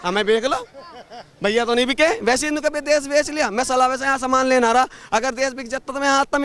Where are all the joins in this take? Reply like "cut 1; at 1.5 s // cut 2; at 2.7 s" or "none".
none